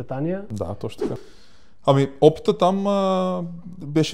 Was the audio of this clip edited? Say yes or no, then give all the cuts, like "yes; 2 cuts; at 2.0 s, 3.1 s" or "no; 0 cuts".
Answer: yes; 1 cut; at 1.3 s